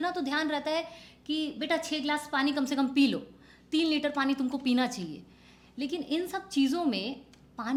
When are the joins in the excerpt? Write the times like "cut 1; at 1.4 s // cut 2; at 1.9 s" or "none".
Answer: none